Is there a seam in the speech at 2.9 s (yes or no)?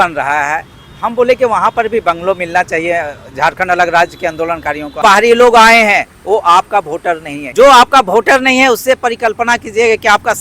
no